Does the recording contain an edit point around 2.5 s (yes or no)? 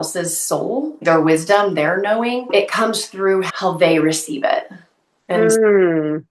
yes